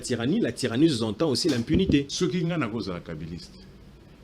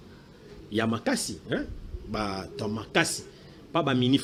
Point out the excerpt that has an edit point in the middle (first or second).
first